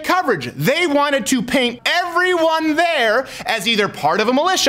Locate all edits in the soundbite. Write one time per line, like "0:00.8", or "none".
0:01.8

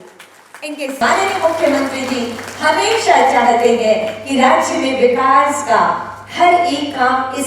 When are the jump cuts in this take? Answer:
0:01.0

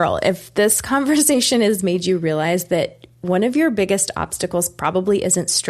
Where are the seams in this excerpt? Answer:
none

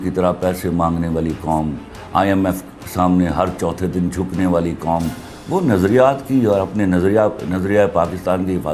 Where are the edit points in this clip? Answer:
none

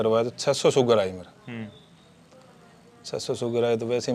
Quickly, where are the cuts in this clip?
none

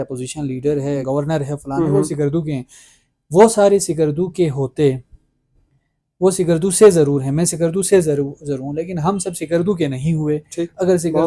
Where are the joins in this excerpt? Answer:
0:01.0

